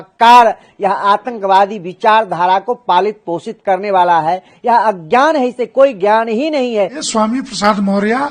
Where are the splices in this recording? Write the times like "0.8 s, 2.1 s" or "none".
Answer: 7.0 s